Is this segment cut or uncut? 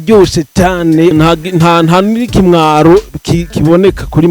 cut